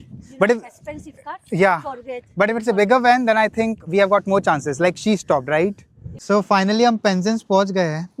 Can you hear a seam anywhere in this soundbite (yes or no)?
no